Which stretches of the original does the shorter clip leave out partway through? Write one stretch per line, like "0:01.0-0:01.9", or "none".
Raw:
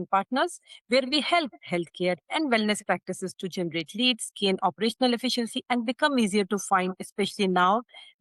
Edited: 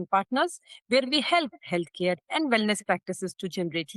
none